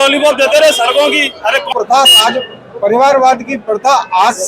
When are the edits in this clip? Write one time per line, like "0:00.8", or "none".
0:01.7

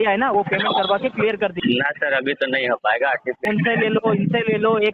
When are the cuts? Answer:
0:01.6
0:03.4

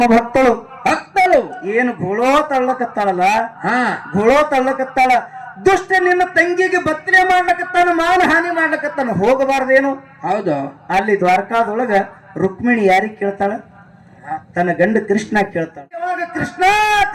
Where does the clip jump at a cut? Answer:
0:16.1

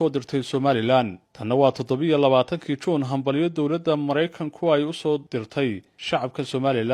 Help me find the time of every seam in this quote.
0:05.4

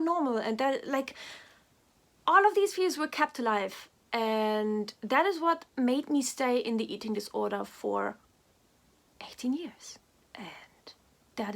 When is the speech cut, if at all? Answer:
none

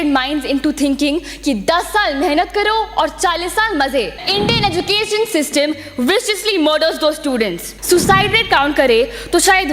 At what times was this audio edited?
0:04.2
0:07.7

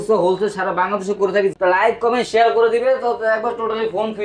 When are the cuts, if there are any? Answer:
0:01.5

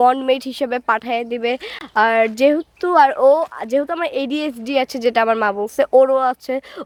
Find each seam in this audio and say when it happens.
none

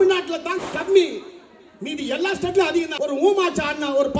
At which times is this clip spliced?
0:02.9

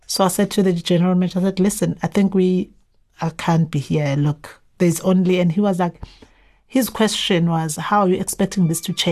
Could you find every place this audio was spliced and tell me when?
none

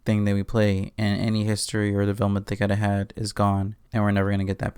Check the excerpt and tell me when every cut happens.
0:03.8

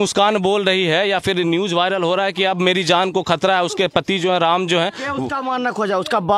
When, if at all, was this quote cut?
none

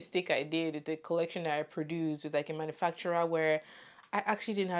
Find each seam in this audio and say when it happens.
none

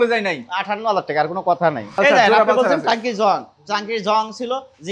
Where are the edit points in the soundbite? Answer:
0:02.0

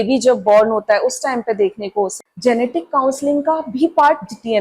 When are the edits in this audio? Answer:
0:02.2

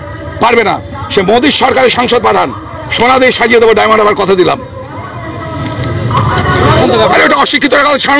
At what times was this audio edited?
0:06.8

